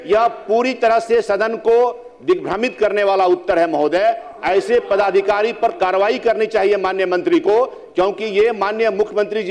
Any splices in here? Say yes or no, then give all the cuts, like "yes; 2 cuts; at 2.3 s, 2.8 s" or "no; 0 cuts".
no; 0 cuts